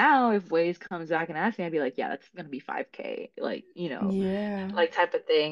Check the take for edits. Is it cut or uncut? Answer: uncut